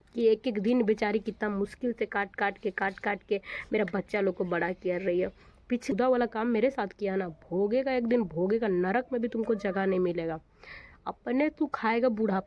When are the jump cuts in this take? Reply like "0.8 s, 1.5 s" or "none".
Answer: 5.9 s